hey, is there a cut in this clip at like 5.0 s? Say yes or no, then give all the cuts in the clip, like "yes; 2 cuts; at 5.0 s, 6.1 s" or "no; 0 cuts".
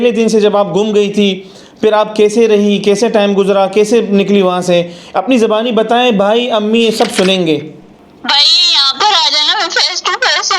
no; 1 cut; at 7.8 s